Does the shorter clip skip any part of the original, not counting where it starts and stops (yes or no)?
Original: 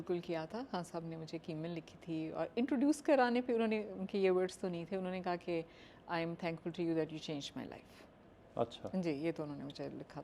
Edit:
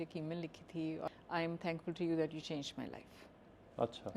yes